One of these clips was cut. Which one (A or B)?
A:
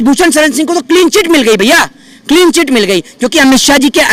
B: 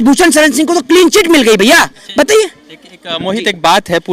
B